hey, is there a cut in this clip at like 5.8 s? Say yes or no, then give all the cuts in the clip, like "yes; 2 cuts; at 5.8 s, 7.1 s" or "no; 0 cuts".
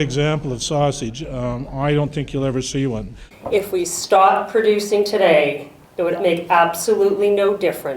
no; 1 cut; at 3.2 s